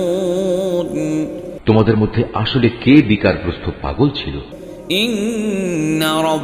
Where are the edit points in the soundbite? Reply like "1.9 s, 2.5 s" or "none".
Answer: 1.5 s, 4.4 s

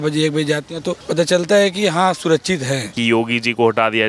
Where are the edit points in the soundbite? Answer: 1.0 s, 2.9 s

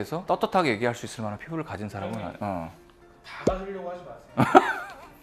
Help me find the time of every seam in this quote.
none

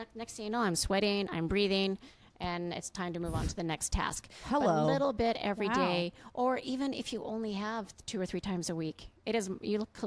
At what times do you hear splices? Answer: none

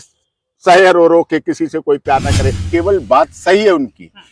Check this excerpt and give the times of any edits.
2.6 s

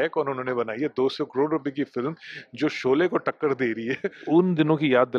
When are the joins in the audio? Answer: 4.1 s

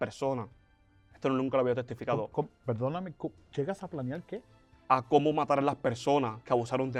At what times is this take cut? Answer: none

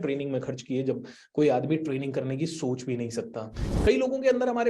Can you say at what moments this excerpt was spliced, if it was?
3.7 s

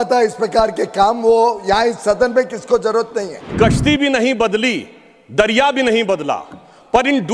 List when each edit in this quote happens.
3.5 s

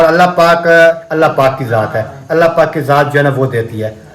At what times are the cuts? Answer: 1.0 s

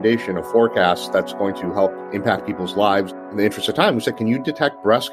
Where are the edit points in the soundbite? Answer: 2.0 s, 3.2 s

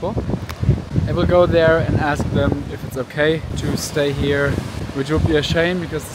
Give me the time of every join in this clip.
0.9 s, 3.5 s, 4.8 s

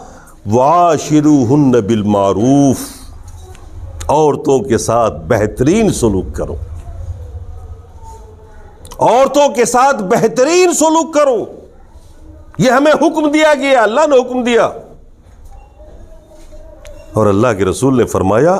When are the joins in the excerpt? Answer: none

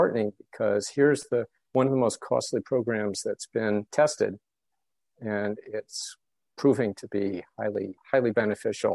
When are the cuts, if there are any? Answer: none

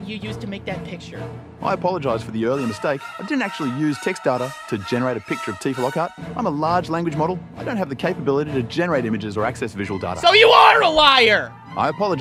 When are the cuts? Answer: none

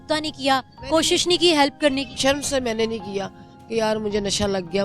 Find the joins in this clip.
2.1 s

